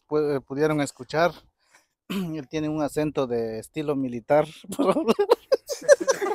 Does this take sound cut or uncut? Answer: uncut